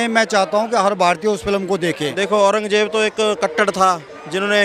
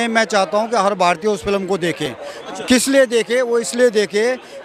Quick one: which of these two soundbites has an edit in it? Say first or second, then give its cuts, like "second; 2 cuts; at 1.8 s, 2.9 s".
first; 1 cut; at 2.1 s